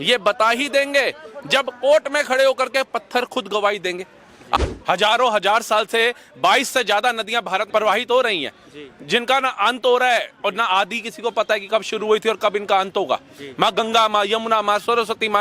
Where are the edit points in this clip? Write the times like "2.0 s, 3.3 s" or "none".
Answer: 4.6 s, 7.7 s